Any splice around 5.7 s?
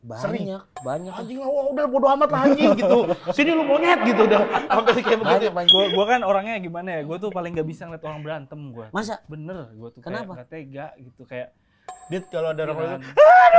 yes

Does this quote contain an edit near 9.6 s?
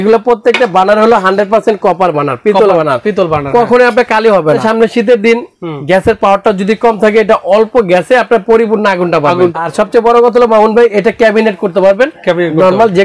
yes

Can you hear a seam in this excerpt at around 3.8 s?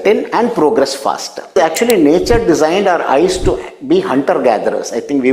no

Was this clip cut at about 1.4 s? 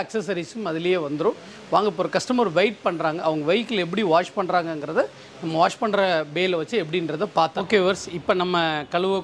no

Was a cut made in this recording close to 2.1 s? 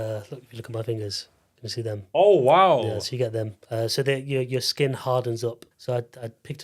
no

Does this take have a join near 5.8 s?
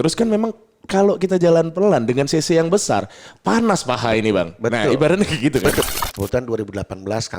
yes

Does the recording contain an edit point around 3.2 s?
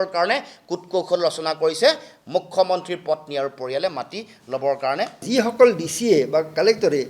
no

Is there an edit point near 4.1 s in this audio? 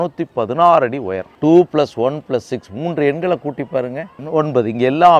yes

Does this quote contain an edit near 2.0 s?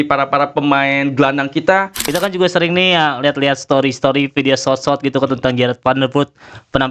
yes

